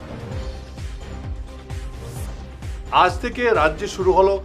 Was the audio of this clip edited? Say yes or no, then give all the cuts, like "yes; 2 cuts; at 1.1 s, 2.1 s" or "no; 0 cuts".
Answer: yes; 1 cut; at 2.2 s